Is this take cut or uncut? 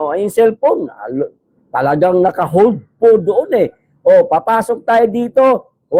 uncut